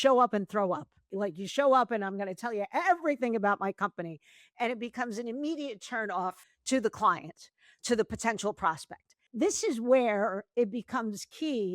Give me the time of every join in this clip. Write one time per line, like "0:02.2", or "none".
0:01.1
0:06.5
0:09.3